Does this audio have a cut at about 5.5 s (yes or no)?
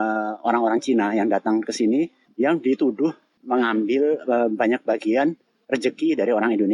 no